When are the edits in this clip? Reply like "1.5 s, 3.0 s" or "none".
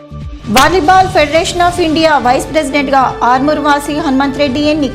none